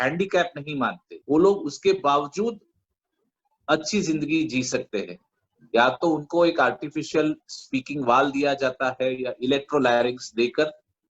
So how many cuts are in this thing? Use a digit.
1